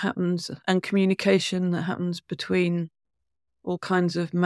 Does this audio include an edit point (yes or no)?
no